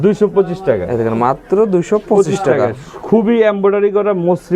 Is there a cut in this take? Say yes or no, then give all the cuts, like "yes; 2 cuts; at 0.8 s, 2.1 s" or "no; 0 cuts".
no; 0 cuts